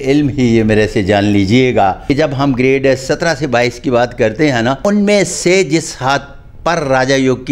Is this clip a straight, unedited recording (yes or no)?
no